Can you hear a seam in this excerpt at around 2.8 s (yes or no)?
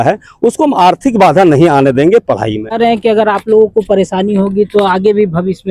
yes